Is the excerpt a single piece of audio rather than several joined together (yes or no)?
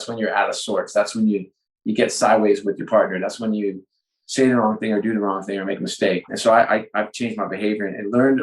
no